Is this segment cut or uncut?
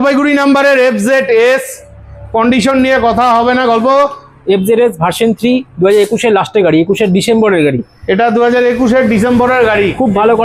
uncut